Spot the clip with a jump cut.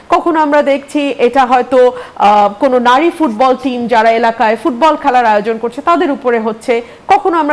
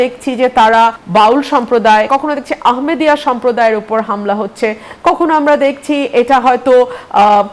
second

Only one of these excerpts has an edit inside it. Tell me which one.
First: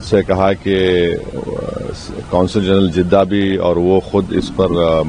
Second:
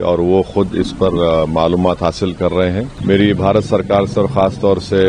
second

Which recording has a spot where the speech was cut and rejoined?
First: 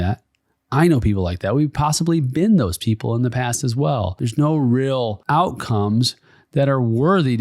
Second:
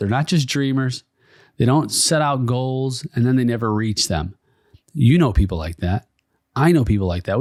first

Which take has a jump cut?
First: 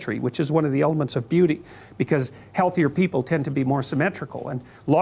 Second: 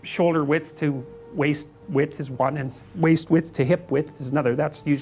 first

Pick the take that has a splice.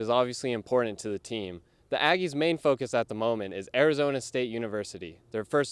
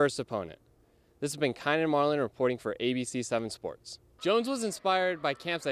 second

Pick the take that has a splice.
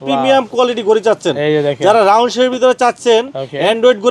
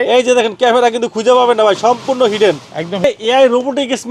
second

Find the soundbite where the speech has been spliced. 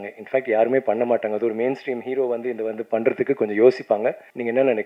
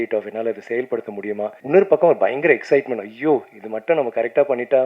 second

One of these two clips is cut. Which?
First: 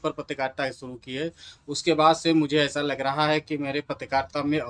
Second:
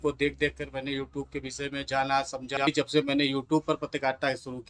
second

